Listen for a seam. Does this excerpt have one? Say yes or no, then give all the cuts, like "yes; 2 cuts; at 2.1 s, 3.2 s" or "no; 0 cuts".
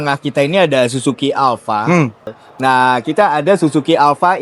yes; 1 cut; at 2.3 s